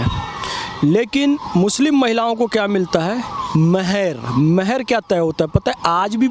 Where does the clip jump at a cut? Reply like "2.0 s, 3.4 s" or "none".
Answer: none